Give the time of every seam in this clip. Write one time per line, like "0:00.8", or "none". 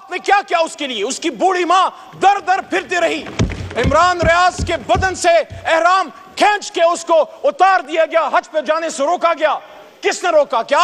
none